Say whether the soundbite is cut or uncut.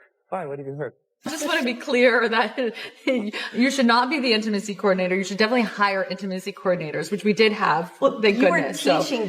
cut